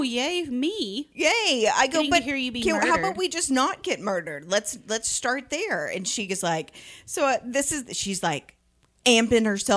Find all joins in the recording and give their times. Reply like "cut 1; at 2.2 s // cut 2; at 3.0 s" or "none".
none